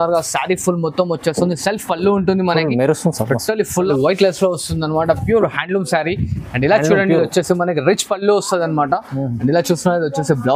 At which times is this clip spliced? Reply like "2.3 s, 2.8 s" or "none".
3.9 s